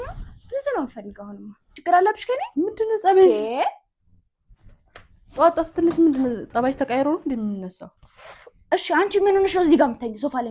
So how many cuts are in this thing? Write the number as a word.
one